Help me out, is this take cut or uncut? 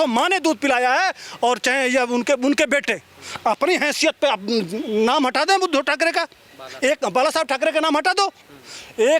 uncut